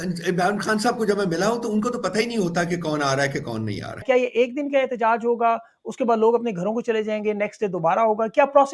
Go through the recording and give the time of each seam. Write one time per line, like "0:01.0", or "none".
0:04.0